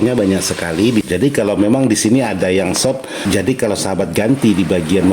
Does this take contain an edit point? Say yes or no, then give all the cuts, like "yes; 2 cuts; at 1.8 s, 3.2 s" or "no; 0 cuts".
yes; 2 cuts; at 1.1 s, 3.1 s